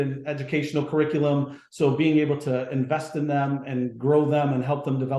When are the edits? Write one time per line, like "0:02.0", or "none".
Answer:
none